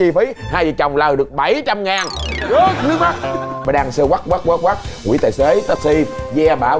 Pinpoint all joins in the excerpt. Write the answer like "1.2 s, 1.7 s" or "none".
3.5 s